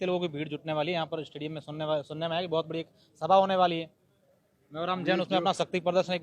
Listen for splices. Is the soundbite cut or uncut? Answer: uncut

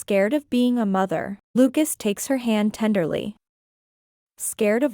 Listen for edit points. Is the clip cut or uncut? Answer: cut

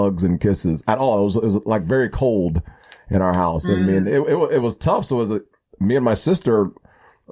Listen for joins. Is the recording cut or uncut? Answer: uncut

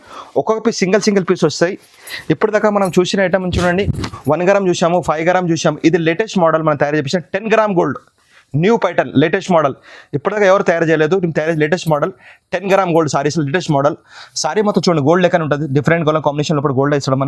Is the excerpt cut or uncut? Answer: uncut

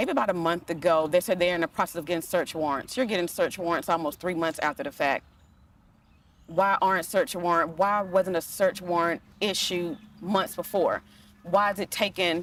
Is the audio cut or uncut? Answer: uncut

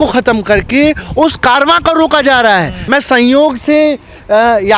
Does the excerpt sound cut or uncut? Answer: cut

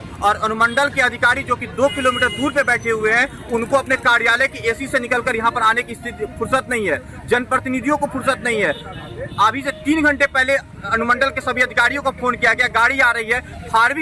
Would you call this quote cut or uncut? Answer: uncut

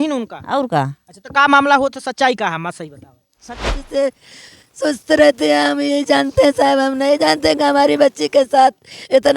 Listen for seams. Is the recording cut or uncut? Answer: cut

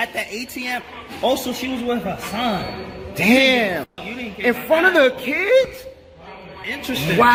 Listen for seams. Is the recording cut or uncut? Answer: uncut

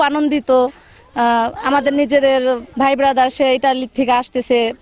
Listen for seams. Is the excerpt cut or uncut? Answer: uncut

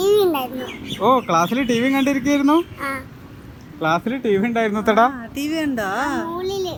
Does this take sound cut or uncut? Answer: uncut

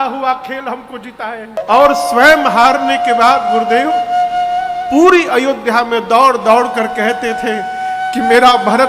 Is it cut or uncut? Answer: cut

